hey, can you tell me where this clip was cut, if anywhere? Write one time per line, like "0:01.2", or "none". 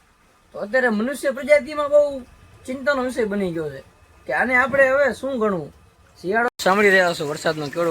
0:06.5